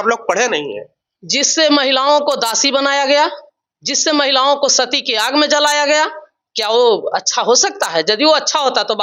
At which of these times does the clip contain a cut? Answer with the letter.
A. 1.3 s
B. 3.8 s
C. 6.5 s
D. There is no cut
D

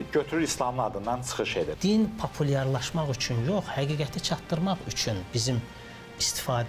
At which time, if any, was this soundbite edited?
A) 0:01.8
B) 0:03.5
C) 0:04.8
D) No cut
A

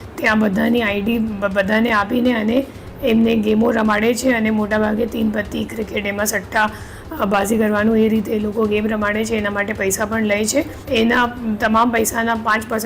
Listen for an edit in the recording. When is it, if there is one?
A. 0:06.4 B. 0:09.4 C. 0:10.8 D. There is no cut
C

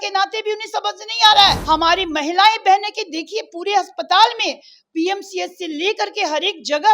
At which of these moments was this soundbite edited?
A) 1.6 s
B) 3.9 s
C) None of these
A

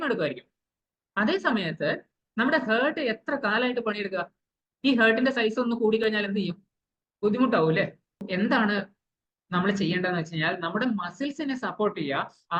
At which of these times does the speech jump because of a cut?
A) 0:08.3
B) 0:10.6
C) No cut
A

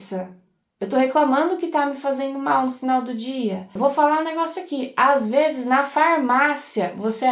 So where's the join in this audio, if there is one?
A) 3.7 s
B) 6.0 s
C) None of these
A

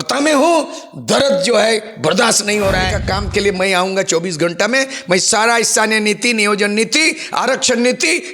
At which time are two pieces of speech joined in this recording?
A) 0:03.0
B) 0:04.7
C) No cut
A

